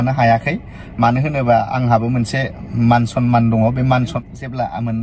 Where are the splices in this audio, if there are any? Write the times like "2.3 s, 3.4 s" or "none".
4.1 s